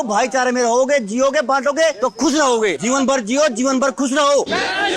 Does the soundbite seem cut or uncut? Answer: uncut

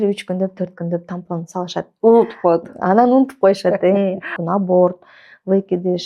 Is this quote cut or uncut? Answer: cut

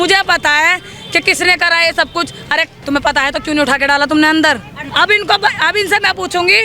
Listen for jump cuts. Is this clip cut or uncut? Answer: cut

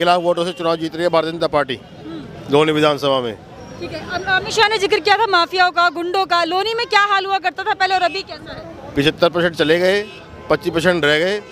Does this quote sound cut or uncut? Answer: uncut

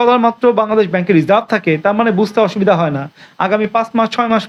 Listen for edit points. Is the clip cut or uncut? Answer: uncut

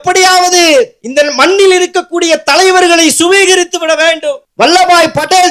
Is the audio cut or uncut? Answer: cut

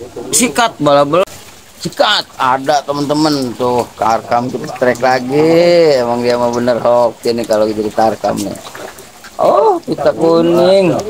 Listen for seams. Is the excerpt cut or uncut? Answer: cut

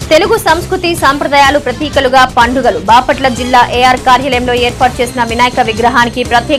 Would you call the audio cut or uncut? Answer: uncut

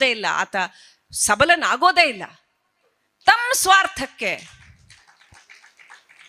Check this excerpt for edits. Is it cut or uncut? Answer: uncut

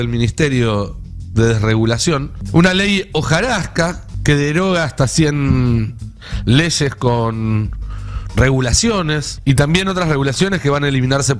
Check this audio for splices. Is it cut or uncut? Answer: cut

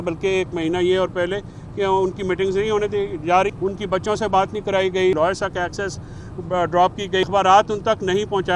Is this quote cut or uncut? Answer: cut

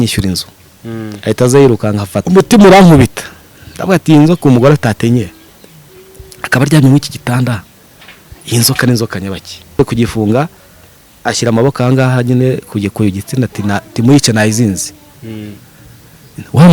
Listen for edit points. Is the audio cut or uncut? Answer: cut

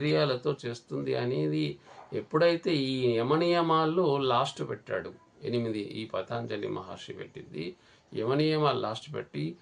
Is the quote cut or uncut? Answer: uncut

